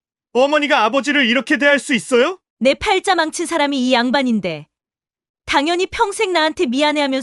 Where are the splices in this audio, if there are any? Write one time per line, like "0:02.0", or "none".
0:02.4